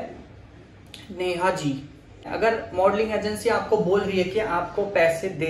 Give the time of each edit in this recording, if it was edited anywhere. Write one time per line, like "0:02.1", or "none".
0:02.3